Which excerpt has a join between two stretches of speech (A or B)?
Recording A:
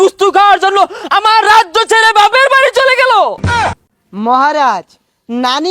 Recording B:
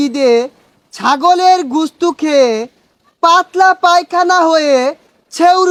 A